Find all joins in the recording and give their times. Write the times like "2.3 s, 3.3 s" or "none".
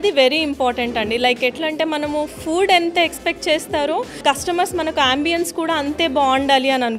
4.2 s